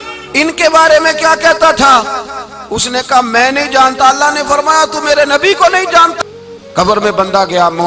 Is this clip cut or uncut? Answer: cut